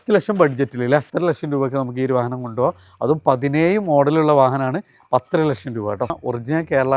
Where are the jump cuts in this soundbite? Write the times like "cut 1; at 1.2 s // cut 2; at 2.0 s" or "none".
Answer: cut 1; at 1.1 s // cut 2; at 6.2 s